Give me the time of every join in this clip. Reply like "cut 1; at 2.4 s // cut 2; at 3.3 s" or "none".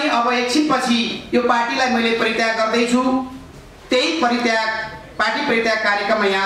none

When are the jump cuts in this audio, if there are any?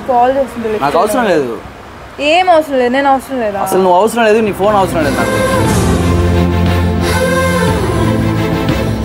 none

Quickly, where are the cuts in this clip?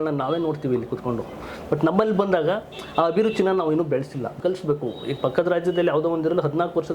cut 1; at 4.3 s

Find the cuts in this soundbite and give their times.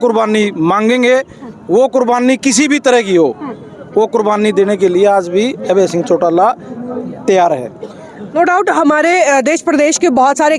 none

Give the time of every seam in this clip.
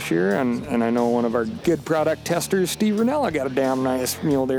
cut 1; at 1.4 s

